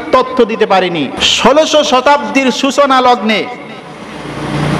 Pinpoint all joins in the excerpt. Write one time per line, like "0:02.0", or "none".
0:01.2

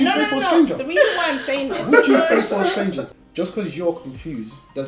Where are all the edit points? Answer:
0:03.2

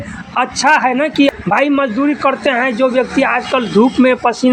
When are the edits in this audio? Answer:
0:01.3

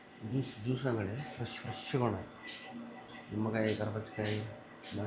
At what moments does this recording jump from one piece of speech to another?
none

